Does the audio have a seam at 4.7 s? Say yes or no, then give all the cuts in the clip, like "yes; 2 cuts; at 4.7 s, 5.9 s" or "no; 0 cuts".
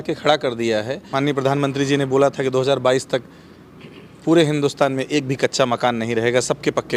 no; 1 cut; at 1.0 s